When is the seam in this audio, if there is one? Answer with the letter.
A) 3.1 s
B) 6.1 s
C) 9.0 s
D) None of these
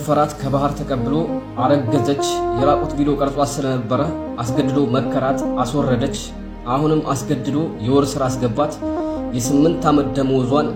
D